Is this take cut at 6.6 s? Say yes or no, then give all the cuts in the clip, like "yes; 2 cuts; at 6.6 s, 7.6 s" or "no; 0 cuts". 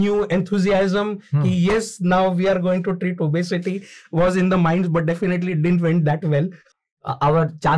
yes; 1 cut; at 6.6 s